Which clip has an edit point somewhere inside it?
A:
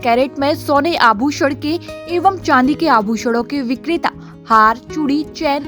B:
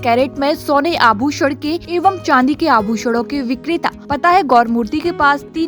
B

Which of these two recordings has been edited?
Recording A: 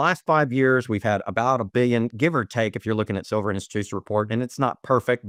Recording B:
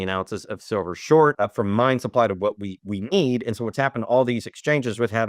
B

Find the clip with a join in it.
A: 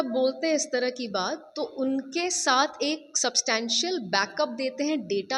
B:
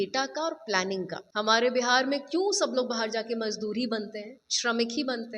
B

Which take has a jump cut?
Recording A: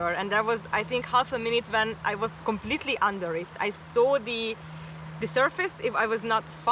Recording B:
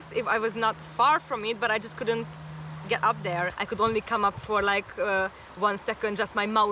B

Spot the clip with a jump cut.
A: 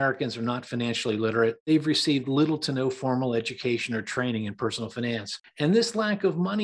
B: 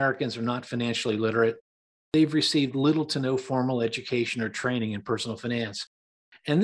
A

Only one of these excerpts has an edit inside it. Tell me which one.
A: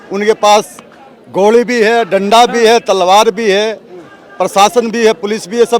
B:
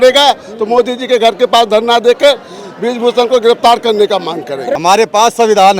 B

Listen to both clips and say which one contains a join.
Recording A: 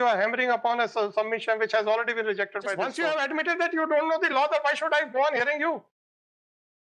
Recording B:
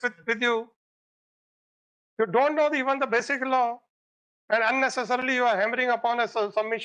A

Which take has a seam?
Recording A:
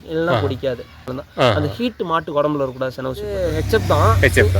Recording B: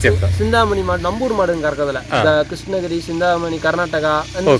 A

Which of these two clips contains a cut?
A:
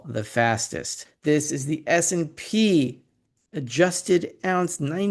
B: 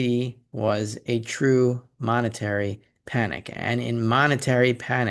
A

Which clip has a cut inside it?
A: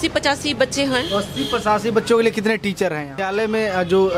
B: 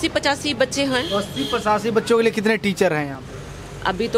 A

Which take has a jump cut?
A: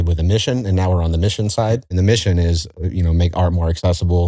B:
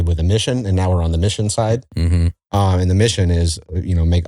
A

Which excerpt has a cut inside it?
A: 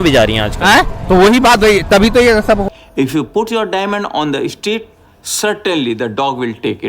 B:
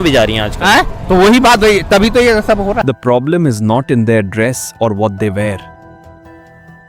A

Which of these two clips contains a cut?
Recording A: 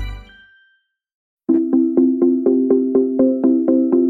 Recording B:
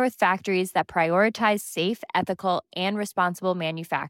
A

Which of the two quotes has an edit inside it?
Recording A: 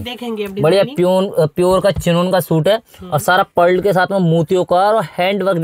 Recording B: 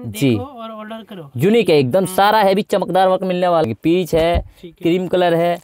B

